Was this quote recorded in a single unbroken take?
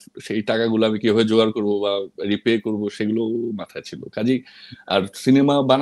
yes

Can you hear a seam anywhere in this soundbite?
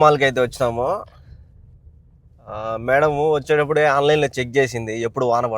no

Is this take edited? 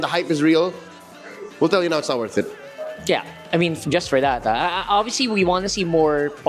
no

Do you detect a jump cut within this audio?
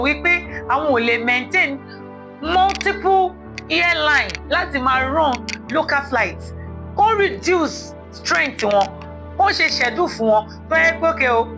no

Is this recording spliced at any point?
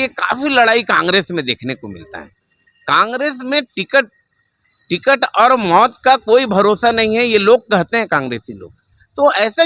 no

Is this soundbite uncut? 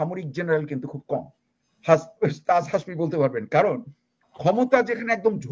yes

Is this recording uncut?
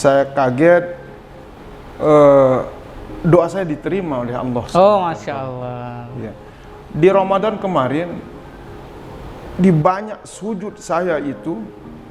yes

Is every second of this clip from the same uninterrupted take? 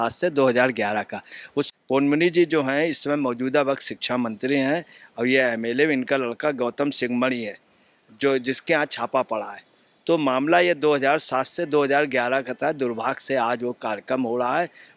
no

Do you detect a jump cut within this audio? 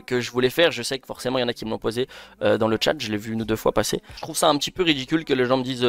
yes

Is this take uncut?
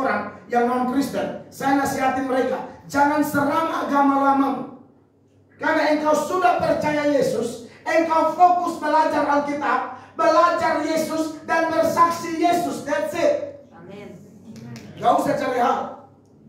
yes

